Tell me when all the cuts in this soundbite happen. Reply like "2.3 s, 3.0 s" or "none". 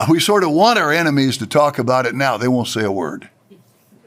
none